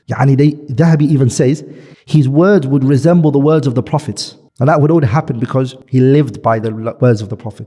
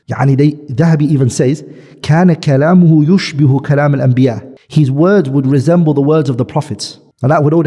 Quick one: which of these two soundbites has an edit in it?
first; 1 cut; at 1.9 s

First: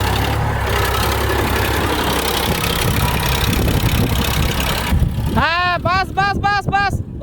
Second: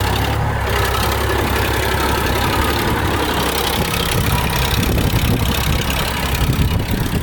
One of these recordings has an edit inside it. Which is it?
first; 2 cuts; at 1.8 s, 4.9 s

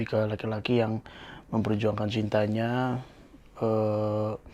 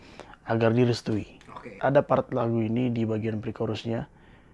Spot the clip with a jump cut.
second; 1 cut; at 1.6 s

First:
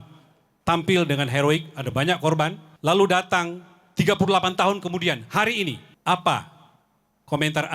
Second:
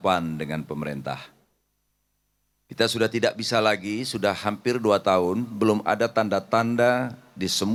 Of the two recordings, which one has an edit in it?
first; 2 cuts; at 2.7 s, 5.9 s

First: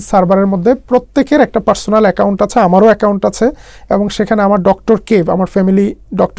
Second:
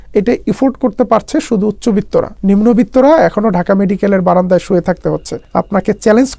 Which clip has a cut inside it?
second; 2 cuts; at 2.3 s, 5.3 s

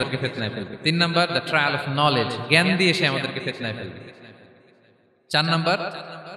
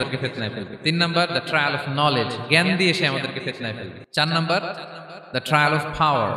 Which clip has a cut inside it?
second; 1 cut; at 3.9 s

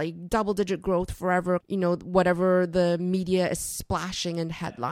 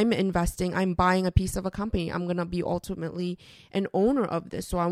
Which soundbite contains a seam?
first; 1 cut; at 1.6 s

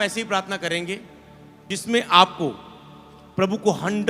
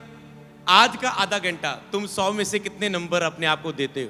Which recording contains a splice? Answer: first; 1 cut; at 1.7 s

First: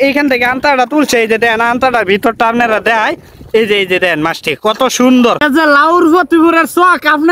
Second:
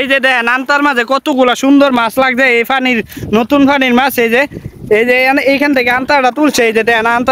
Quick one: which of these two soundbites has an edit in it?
first; 1 cut; at 5.4 s

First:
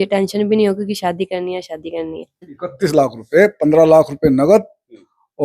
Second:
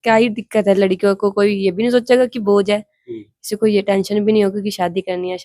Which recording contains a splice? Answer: first; 1 cut; at 2.6 s

